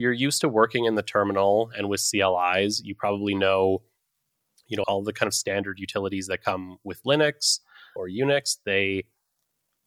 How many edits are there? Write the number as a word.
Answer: two